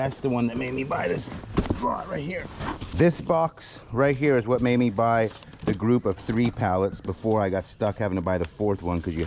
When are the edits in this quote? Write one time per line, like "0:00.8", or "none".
0:02.9